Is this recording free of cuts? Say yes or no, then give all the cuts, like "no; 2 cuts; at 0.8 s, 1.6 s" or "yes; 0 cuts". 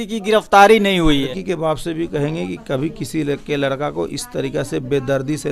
no; 1 cut; at 1.3 s